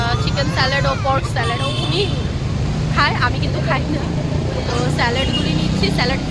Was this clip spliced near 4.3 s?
no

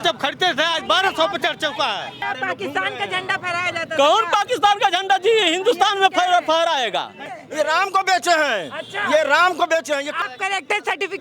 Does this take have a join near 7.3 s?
yes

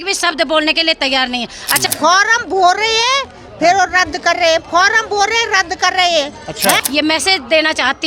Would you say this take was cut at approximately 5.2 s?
no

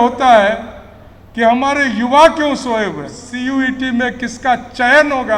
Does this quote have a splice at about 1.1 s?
no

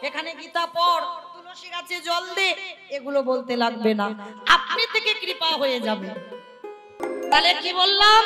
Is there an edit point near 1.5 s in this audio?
no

